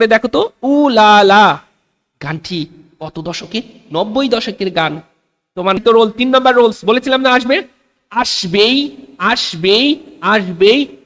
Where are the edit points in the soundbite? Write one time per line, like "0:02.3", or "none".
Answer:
0:05.8